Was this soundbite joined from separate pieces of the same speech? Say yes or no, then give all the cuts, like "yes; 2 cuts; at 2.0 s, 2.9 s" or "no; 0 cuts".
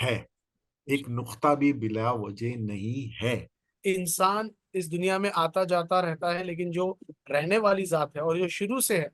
yes; 1 cut; at 3.6 s